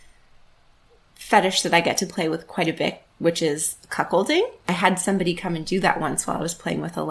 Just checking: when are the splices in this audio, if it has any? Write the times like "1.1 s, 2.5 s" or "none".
4.6 s